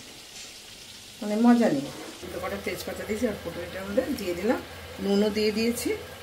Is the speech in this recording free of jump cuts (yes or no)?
no